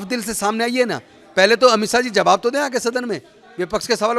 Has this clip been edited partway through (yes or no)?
no